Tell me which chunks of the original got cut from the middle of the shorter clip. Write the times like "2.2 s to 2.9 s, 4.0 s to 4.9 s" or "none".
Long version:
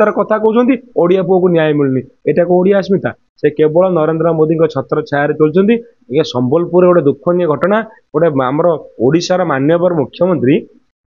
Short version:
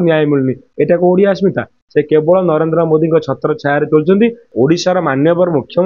5.9 s to 8.9 s